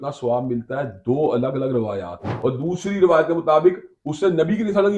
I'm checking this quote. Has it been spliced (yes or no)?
yes